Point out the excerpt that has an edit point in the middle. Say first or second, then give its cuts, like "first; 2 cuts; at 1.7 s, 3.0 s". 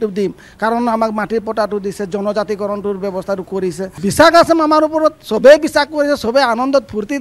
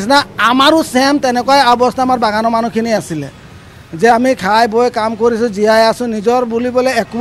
first; 1 cut; at 4.0 s